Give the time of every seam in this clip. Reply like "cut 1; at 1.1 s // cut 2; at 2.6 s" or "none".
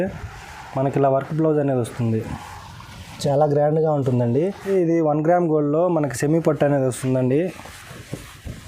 cut 1; at 4.6 s